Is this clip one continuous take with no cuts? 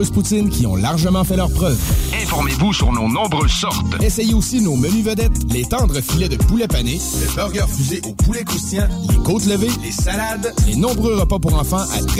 yes; 0 cuts

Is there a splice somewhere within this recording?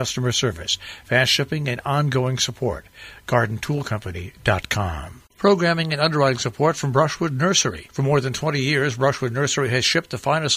yes; 1 cut; at 5.3 s

